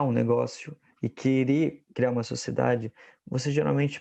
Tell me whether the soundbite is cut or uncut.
uncut